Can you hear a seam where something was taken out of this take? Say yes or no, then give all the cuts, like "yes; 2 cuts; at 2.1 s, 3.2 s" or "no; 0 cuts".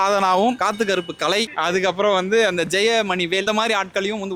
no; 0 cuts